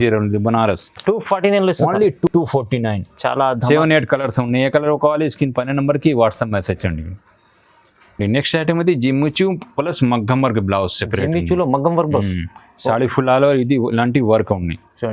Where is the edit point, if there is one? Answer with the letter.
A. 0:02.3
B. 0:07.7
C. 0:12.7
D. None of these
D